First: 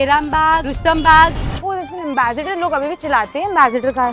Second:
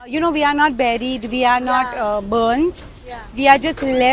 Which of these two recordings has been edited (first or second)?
first